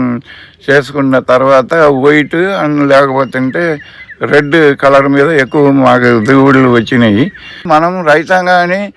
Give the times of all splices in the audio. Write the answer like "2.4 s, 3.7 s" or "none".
7.5 s